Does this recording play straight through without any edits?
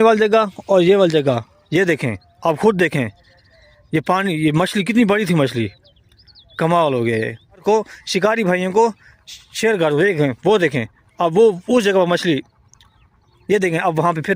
no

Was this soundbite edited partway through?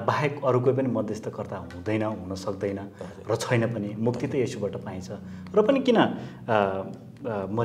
no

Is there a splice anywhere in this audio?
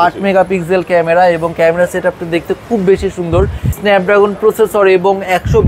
yes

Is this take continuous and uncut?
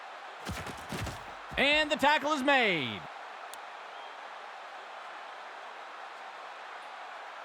yes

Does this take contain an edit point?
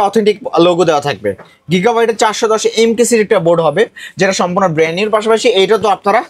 no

